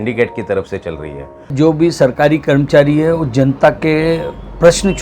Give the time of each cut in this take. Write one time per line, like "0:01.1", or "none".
0:01.5

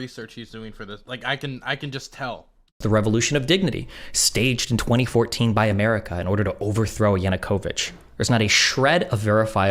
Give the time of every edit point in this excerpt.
0:02.8

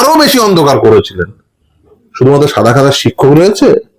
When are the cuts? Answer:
0:02.0

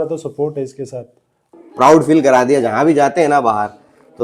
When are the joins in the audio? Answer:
0:01.5

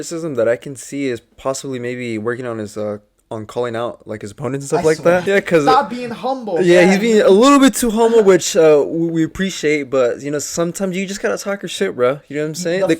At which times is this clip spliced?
0:05.2

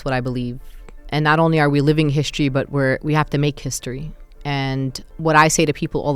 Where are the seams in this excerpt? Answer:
0:05.1

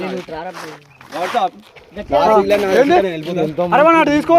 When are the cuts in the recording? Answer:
none

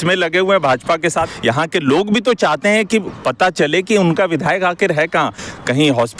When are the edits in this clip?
0:01.3

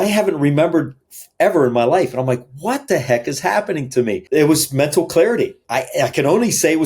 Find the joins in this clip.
0:04.2
0:05.6

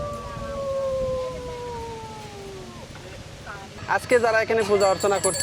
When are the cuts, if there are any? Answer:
0:03.8

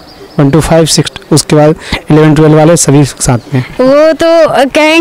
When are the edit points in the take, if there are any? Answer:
0:03.6

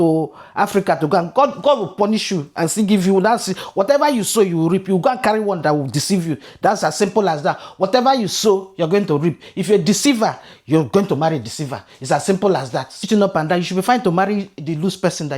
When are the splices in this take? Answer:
0:13.0

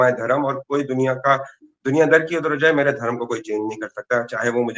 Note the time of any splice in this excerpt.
none

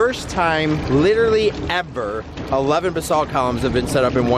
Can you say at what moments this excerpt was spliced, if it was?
none

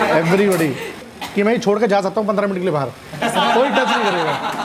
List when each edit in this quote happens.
0:01.1

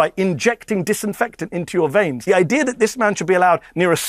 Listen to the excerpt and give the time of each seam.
0:02.2

